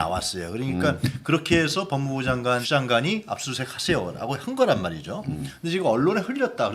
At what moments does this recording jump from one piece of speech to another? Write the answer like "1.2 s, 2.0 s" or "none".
2.6 s